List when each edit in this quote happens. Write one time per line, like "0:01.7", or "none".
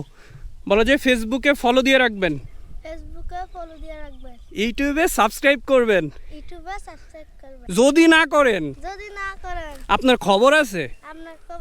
0:07.6